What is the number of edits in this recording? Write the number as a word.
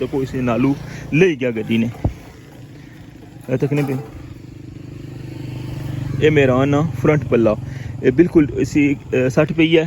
zero